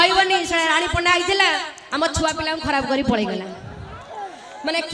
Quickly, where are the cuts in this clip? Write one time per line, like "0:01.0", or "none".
none